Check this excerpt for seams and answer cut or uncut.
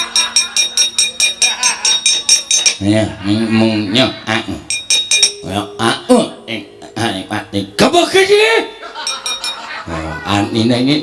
uncut